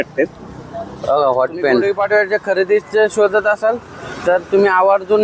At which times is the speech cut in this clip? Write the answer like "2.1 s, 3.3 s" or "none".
1.8 s

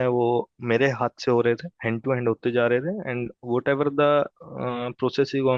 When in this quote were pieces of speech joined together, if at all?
none

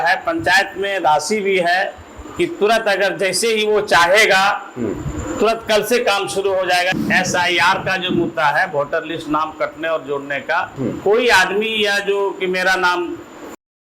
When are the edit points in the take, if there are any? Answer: 6.9 s, 10.7 s

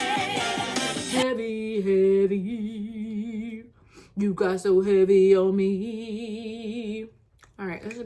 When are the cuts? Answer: 1.1 s

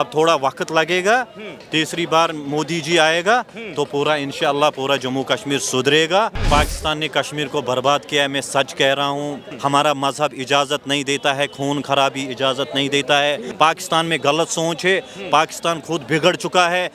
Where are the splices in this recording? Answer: 6.4 s, 9.4 s, 13.5 s

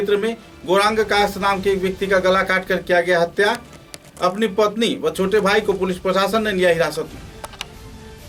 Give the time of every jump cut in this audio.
none

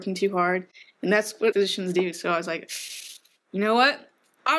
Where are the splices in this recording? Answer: 1.5 s

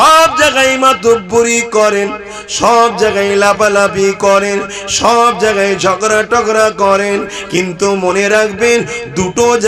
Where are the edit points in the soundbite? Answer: none

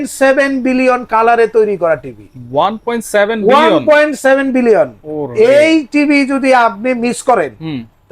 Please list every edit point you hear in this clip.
none

